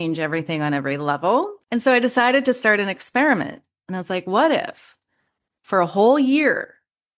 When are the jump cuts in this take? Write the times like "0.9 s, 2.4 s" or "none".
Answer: 1.6 s